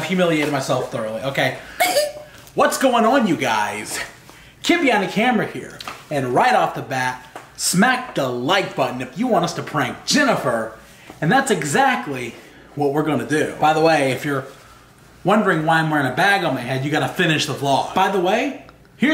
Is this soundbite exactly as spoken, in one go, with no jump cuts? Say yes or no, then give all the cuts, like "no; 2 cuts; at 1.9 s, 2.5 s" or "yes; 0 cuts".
no; 2 cuts; at 13.5 s, 17.9 s